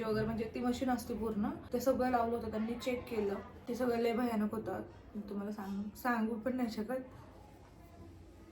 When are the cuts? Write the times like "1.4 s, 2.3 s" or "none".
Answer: 1.6 s, 3.5 s